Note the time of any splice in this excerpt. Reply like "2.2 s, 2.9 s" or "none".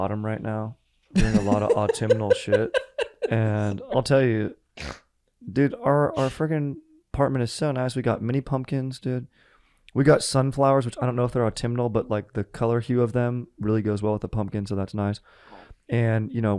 none